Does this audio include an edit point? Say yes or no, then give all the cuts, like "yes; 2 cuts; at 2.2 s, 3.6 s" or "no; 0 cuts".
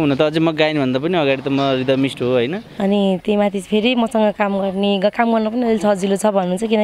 yes; 1 cut; at 2.6 s